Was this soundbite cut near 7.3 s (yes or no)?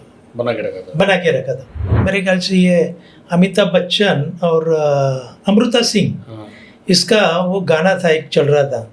no